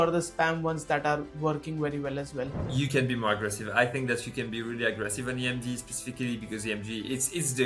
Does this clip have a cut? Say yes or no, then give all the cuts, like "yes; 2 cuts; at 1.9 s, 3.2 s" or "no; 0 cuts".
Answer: no; 0 cuts